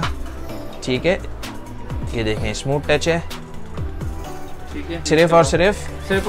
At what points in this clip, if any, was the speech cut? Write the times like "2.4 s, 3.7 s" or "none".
5.1 s